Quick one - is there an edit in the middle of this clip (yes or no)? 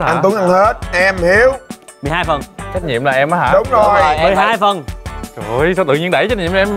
no